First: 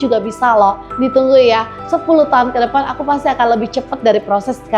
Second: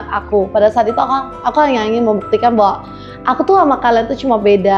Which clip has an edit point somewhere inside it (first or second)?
first